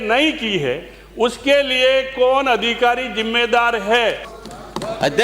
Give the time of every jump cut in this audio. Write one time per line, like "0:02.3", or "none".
0:04.3